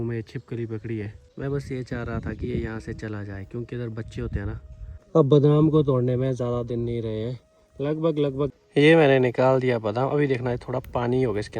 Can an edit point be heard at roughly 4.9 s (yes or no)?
yes